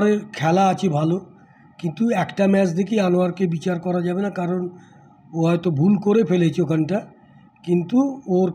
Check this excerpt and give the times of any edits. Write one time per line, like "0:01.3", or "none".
none